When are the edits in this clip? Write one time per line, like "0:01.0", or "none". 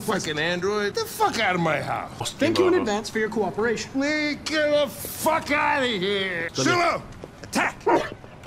0:00.9
0:02.3
0:06.5